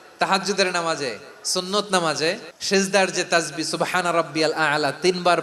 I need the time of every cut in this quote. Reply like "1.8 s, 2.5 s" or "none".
2.5 s